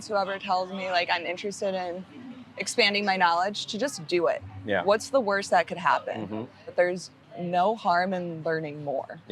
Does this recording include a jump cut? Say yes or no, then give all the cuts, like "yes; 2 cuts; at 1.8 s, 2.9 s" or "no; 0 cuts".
yes; 1 cut; at 6.6 s